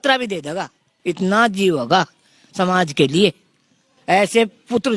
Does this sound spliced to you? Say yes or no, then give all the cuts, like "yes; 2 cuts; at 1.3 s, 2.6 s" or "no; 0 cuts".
no; 0 cuts